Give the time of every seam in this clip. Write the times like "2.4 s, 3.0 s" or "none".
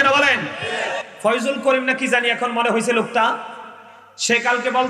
0.9 s